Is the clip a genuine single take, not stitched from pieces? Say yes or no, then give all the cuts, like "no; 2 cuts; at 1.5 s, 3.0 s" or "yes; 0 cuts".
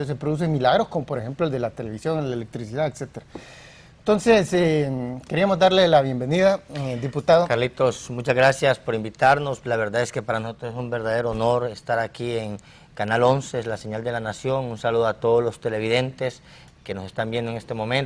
yes; 0 cuts